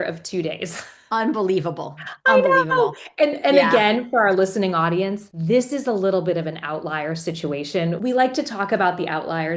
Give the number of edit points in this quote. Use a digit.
2